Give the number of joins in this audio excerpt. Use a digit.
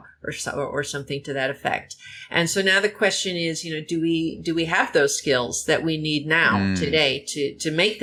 0